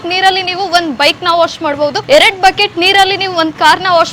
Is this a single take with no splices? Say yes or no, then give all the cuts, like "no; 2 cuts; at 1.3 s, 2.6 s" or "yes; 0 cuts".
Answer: no; 1 cut; at 2.0 s